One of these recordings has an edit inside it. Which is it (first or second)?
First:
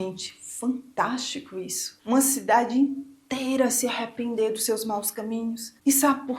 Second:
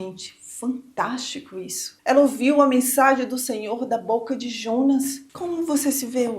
second